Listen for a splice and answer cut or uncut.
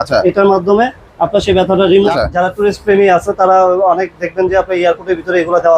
cut